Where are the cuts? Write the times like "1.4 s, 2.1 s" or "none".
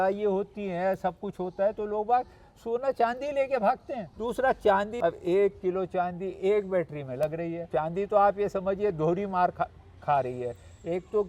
4.0 s, 4.9 s, 7.7 s